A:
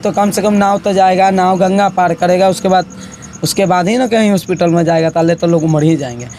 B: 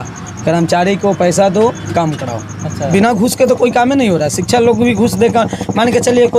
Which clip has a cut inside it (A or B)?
B